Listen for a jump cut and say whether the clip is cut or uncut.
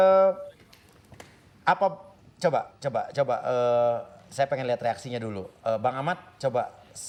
uncut